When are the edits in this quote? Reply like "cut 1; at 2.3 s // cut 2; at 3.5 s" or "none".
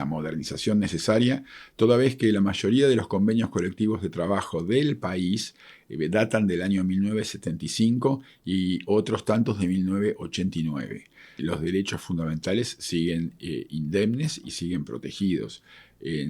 cut 1; at 11.4 s